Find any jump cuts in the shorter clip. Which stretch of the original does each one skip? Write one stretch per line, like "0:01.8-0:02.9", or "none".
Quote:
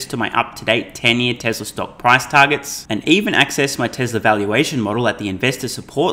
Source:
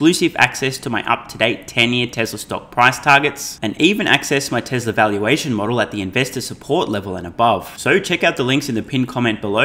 none